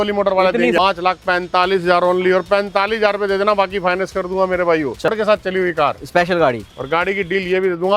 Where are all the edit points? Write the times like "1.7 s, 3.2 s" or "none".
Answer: 0.8 s, 5.1 s